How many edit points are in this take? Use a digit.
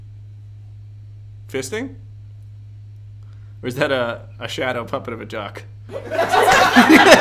0